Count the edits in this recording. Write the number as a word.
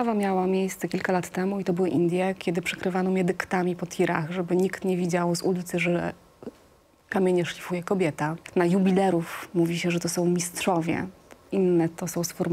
one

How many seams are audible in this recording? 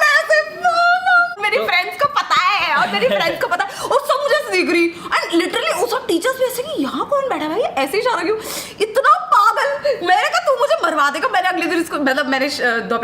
zero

